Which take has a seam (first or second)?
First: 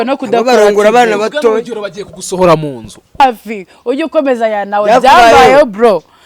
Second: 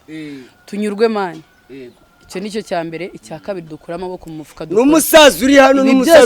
first